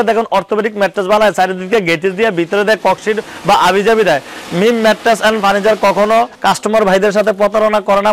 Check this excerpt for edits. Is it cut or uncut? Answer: uncut